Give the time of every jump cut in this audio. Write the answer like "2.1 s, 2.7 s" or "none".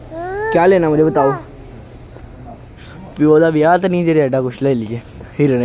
none